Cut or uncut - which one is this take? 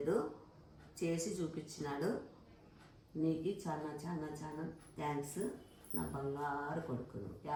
uncut